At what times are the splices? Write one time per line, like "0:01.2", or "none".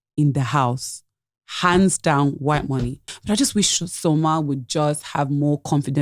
0:03.1